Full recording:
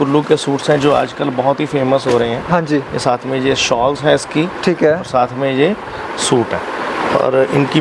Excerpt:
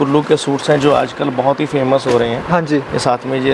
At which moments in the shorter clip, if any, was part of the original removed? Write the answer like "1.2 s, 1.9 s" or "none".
none